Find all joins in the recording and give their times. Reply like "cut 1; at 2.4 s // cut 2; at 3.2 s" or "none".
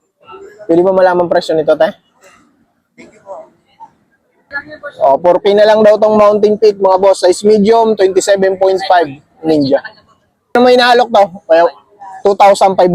cut 1; at 4.4 s // cut 2; at 10.5 s